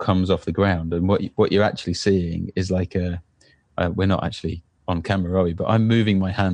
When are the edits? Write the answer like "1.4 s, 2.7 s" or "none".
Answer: none

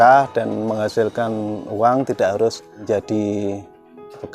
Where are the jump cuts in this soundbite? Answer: 2.8 s

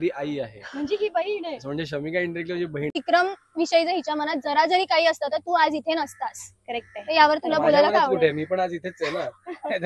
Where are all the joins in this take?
3.0 s

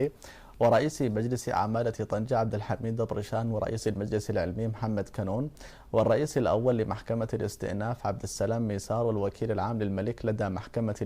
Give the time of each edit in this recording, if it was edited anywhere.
1.8 s

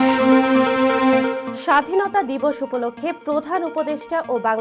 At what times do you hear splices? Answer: 1.5 s

